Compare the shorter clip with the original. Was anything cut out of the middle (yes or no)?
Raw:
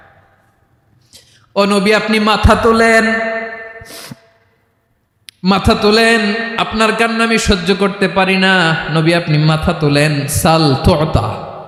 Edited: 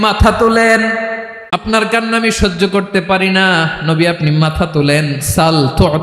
yes